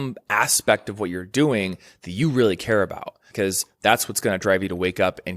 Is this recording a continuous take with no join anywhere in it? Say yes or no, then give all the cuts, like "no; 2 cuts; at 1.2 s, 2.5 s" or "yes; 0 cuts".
no; 1 cut; at 3.2 s